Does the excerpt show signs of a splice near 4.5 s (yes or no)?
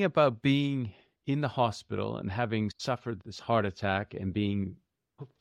no